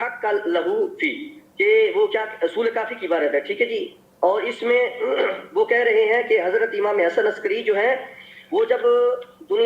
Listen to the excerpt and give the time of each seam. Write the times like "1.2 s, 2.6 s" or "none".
none